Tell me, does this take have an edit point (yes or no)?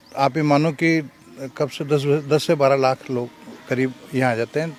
no